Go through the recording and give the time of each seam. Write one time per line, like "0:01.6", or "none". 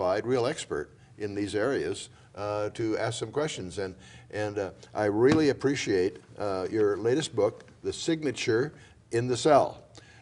0:04.9